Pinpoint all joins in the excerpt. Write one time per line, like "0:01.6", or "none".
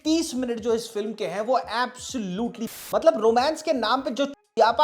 0:02.8